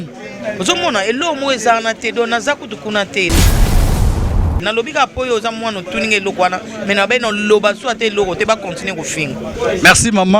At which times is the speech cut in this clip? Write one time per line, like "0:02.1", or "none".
0:03.3
0:04.6